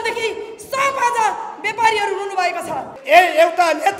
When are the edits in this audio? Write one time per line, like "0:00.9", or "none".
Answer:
0:02.9